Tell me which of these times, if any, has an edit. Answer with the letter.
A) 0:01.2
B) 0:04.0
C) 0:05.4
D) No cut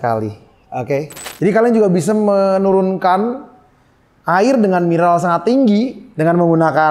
A